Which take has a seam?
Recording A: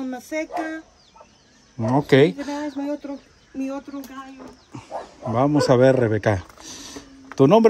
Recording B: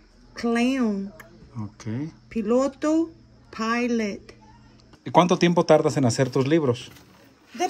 B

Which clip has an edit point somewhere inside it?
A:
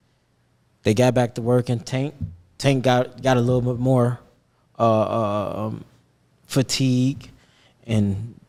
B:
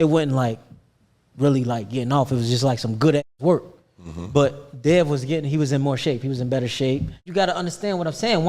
B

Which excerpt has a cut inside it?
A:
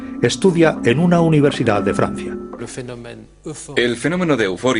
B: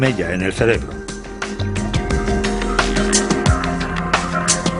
A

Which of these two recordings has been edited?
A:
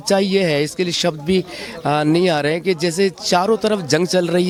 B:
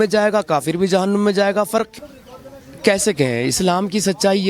B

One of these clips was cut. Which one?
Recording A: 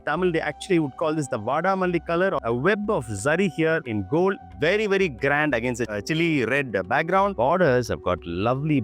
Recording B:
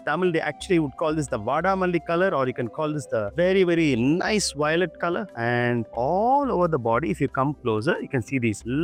A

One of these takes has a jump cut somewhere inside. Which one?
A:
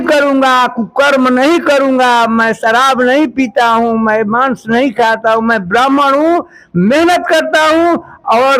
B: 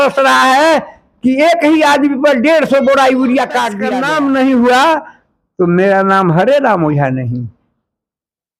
B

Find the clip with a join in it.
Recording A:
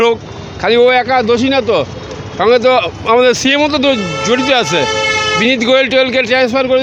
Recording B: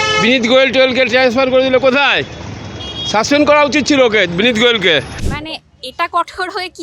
B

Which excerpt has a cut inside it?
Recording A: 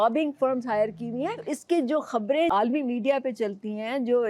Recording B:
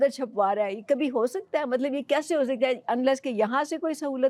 A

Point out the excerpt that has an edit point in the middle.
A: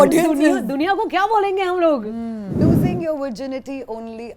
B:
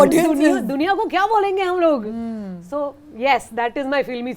A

